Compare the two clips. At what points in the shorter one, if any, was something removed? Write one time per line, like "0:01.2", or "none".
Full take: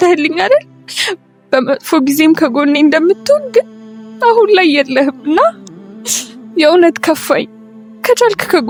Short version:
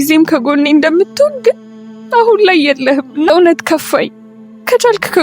0:03.3